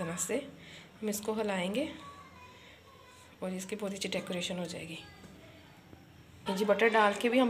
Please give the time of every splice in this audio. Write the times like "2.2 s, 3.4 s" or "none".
6.5 s